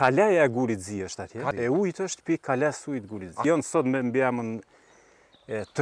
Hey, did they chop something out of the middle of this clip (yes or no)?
yes